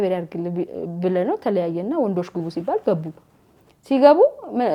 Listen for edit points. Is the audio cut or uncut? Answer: uncut